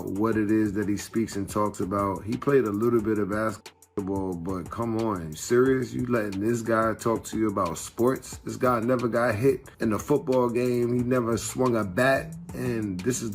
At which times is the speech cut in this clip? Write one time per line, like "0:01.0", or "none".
0:09.7